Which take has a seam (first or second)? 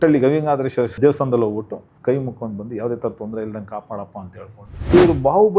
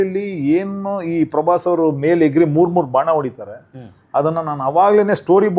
first